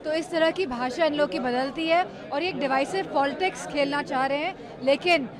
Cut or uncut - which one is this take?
uncut